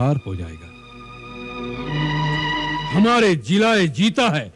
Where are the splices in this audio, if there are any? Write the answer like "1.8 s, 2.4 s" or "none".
2.8 s